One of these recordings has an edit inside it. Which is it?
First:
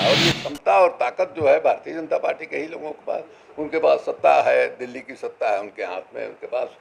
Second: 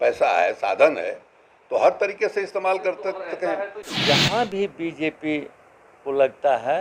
second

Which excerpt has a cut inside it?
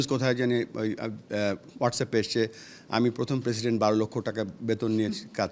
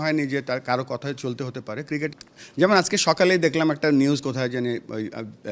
second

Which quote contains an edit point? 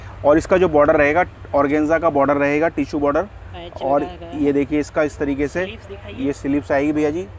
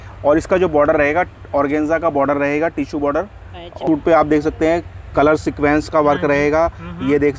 second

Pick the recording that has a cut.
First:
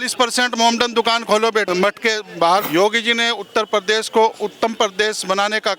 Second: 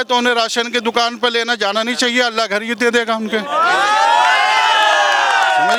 first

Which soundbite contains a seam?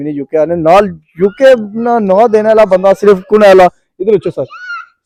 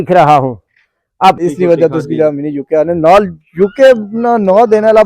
second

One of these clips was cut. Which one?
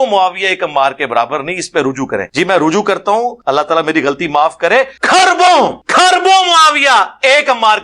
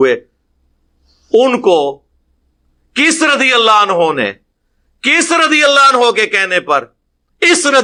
first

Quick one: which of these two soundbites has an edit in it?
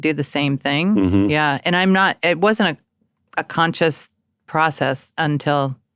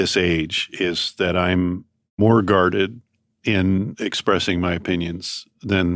second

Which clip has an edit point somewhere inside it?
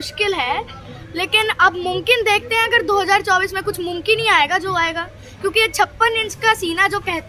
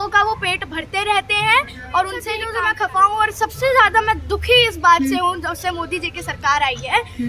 second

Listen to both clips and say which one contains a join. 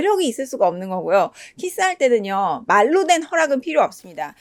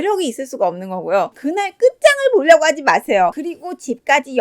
second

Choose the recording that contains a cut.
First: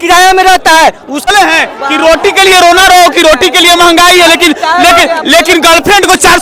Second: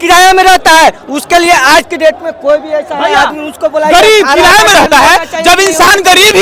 first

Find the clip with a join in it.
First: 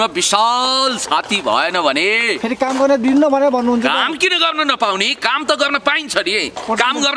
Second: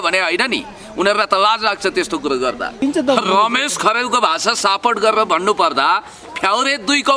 second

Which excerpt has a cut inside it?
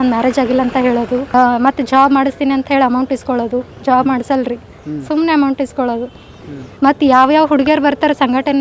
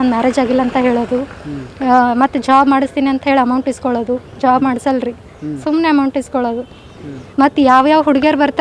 first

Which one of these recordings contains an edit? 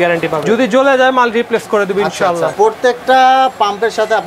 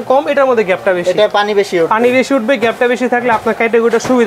first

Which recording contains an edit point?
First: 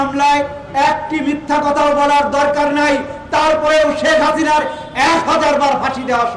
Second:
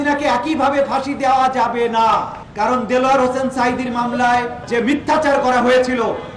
second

